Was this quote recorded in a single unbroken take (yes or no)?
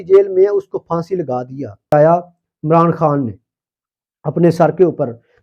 no